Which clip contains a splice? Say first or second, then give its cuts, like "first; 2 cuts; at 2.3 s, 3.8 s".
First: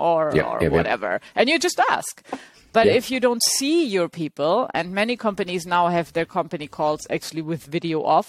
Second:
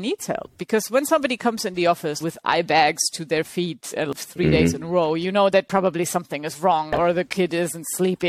second; 3 cuts; at 2.2 s, 4.1 s, 7.0 s